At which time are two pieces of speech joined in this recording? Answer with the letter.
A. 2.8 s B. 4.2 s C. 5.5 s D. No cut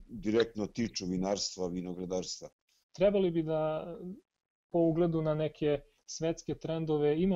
A